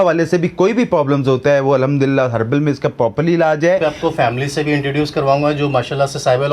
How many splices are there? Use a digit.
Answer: 1